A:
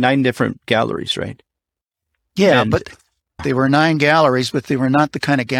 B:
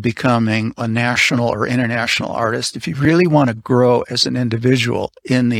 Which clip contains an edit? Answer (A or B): A